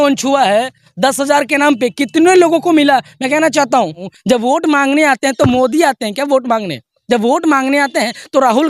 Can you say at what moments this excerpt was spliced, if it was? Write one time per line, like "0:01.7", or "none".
0:04.1